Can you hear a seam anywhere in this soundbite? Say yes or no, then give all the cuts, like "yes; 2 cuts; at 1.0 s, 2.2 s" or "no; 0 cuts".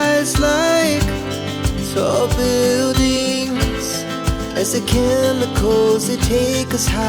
no; 0 cuts